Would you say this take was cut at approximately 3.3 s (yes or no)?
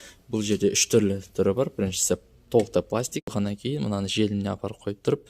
yes